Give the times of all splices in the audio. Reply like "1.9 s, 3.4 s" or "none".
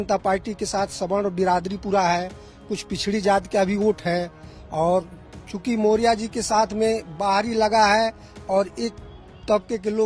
none